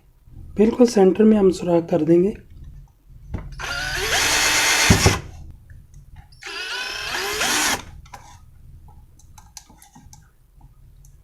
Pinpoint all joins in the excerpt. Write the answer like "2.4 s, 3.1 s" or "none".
none